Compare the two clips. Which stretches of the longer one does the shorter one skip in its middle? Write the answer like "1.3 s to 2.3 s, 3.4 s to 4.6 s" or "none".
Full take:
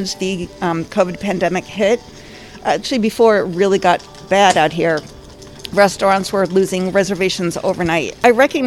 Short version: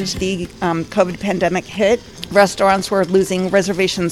2.2 s to 5.6 s